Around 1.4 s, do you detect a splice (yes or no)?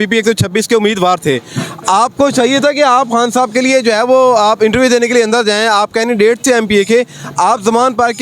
no